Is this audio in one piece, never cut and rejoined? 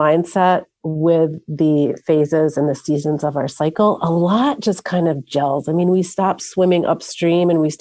yes; 0 cuts

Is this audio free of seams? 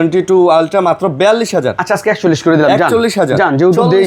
yes; 0 cuts

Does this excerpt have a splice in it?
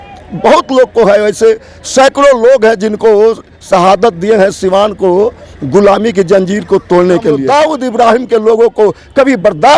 yes; 1 cut; at 7.4 s

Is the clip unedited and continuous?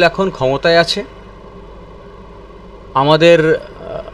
yes; 0 cuts

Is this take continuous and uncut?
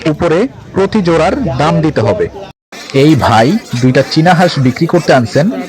no; 1 cut; at 2.5 s

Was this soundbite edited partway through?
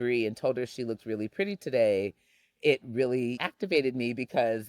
yes; 1 cut; at 3.4 s

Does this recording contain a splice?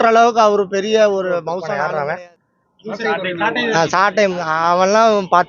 yes; 1 cut; at 1.6 s

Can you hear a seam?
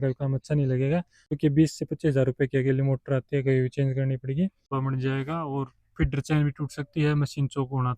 yes; 2 cuts; at 1.4 s, 4.6 s

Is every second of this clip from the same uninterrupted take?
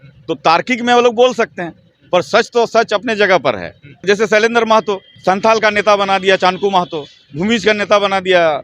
no; 2 cuts; at 4.0 s, 5.1 s

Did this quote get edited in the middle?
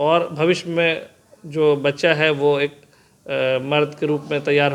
no; 0 cuts

